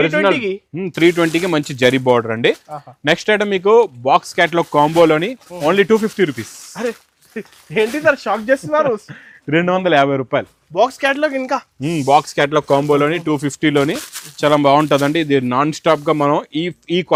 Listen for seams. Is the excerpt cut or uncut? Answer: uncut